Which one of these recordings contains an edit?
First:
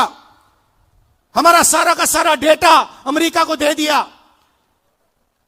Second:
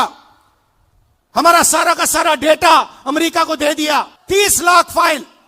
second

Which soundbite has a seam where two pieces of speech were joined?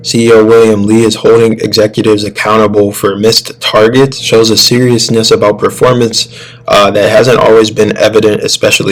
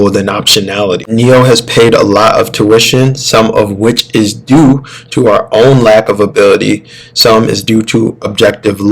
second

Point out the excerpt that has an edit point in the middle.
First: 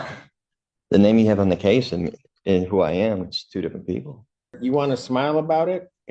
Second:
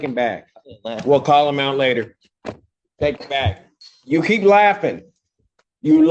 first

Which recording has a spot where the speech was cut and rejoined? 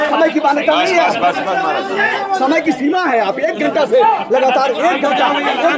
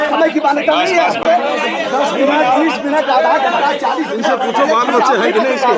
second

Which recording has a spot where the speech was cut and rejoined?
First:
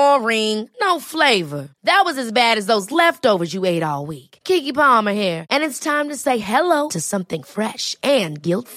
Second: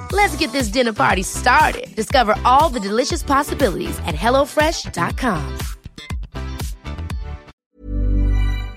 second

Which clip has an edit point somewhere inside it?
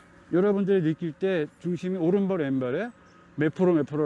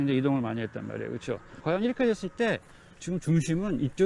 second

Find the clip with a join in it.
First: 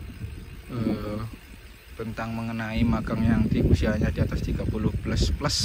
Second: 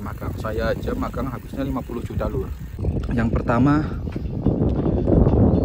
second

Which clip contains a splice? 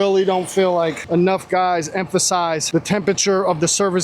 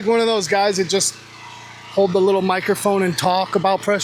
first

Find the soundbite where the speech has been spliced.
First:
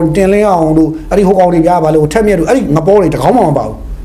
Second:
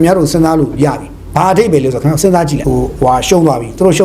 second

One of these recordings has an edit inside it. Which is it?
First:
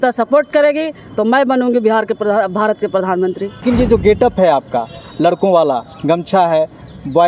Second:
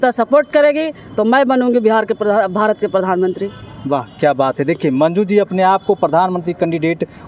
first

